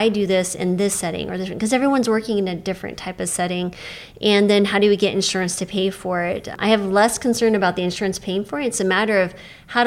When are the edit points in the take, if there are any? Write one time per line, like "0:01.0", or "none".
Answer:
0:06.5